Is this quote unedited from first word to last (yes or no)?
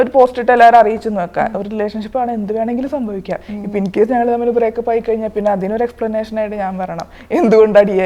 yes